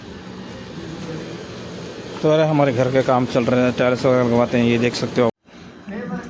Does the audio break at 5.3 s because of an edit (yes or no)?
yes